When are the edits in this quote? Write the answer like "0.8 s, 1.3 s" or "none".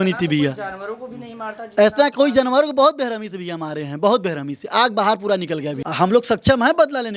5.8 s